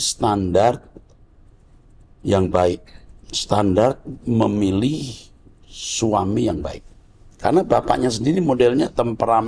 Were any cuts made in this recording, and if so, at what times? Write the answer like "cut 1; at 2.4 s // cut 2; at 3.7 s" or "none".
none

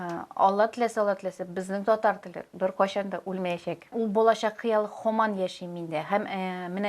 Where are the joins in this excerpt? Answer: cut 1; at 3.9 s

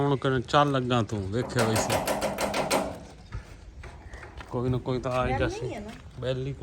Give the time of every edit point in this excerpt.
none

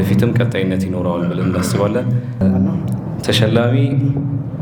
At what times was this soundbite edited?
cut 1; at 2.4 s

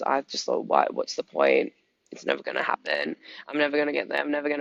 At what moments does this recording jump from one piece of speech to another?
none

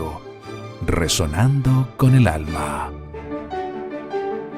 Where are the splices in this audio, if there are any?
cut 1; at 3.2 s

